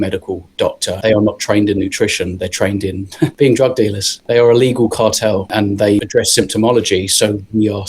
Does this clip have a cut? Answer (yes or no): yes